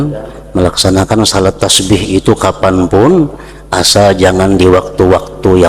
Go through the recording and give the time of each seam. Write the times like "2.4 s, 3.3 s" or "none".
none